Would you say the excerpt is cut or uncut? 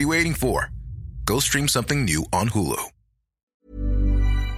cut